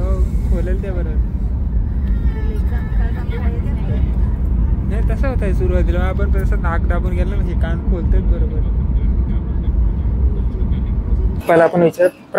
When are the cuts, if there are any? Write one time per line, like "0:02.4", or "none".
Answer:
0:11.4